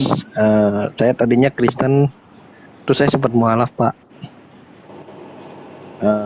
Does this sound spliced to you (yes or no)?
no